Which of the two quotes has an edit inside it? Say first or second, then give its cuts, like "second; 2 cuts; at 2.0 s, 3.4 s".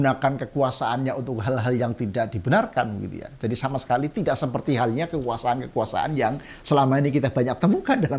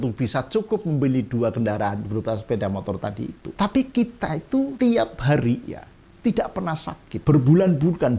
second; 3 cuts; at 3.4 s, 4.7 s, 7.1 s